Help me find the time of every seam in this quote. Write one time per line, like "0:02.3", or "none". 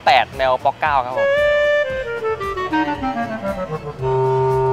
0:01.1